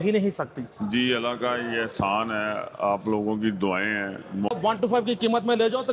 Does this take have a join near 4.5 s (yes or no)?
yes